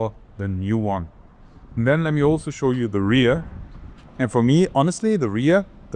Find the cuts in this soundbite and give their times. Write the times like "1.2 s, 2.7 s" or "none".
none